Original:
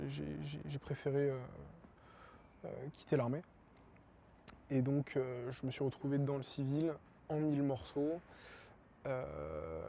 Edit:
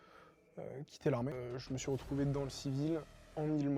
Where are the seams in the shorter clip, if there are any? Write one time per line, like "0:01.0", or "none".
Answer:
0:01.3